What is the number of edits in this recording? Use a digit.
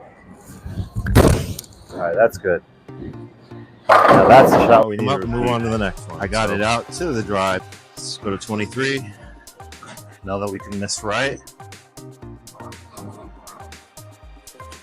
3